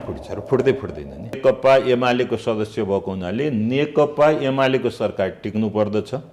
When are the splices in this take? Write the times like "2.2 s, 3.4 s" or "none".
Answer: 1.4 s